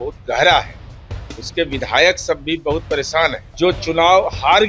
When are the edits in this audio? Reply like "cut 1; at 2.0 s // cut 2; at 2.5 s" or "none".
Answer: cut 1; at 3.4 s